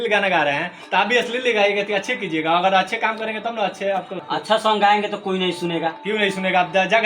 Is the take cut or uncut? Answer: cut